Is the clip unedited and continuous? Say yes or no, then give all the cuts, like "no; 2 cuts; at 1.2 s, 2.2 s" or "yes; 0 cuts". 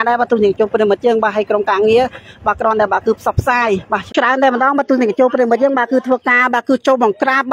no; 1 cut; at 4.1 s